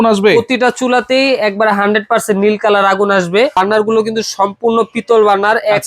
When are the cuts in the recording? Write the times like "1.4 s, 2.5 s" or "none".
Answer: 3.6 s